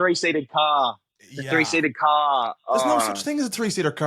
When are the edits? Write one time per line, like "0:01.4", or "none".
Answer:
0:03.1